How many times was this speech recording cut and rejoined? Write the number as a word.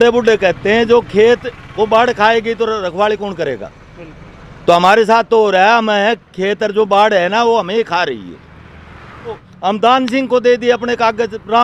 one